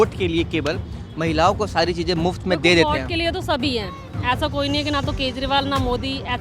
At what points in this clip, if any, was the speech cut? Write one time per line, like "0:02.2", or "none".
none